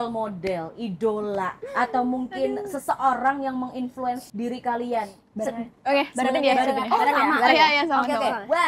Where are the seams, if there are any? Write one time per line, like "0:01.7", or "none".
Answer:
0:01.6
0:04.3